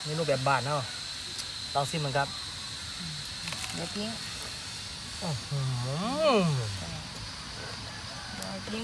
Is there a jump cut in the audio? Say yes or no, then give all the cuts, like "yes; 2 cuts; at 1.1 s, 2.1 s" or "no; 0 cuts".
no; 0 cuts